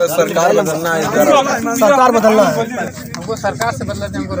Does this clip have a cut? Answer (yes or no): yes